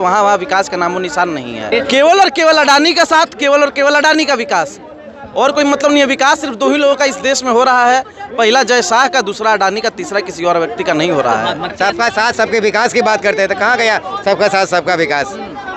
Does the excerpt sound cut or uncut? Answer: cut